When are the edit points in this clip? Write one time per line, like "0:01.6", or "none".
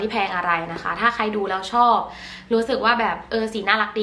none